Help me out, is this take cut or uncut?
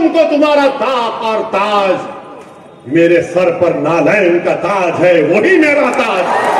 uncut